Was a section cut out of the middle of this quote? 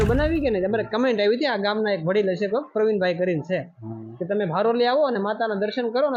no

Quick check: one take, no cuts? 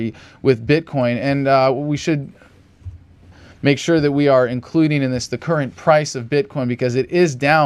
no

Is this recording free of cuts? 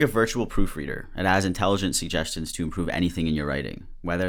yes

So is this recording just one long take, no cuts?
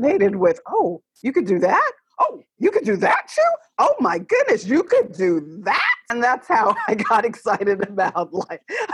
no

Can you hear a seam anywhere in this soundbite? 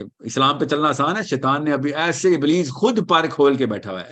no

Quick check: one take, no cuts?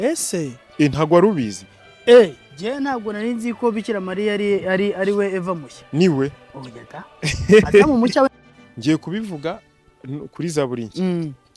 no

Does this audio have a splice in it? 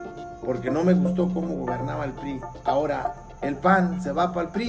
no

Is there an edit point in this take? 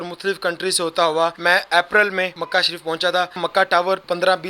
yes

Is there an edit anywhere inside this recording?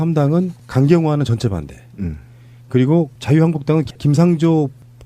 yes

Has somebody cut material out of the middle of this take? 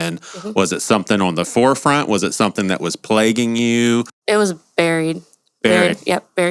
yes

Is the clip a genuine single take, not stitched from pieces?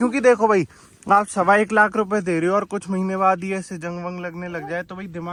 yes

